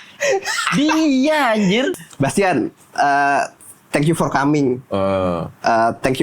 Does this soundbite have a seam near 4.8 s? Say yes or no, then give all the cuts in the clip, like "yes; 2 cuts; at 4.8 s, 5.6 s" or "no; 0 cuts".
no; 1 cut; at 1.9 s